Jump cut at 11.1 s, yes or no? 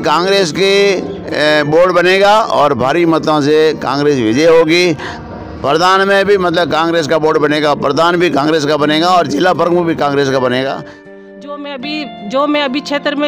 yes